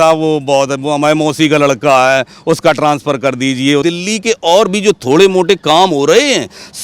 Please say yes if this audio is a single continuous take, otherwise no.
no